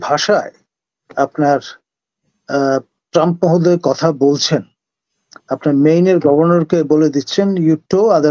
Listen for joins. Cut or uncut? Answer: uncut